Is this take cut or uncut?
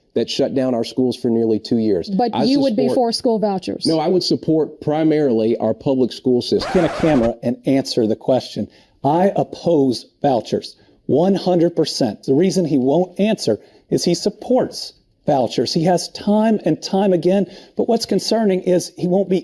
cut